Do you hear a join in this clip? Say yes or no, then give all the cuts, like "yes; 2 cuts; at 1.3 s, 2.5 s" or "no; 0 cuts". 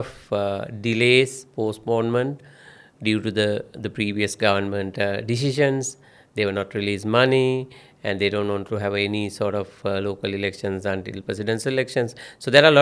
no; 0 cuts